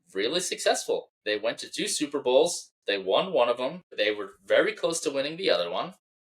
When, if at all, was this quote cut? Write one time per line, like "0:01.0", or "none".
0:01.1
0:03.8